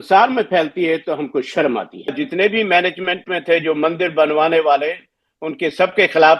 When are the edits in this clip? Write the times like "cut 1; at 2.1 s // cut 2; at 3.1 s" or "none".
cut 1; at 2.1 s

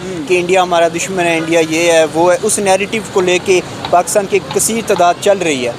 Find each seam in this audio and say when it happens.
none

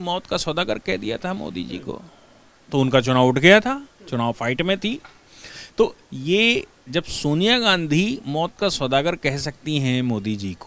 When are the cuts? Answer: none

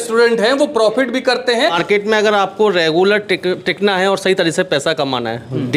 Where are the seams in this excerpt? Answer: cut 1; at 1.8 s

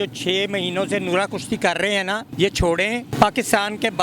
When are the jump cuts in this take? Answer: cut 1; at 2.3 s // cut 2; at 3.1 s

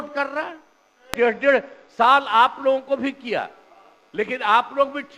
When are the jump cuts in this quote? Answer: cut 1; at 1.1 s

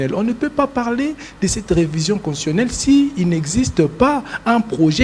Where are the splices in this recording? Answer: none

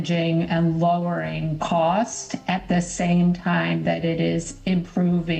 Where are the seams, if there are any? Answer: none

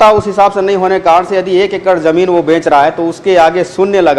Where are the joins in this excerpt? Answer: none

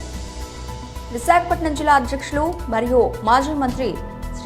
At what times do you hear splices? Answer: cut 1; at 1.1 s

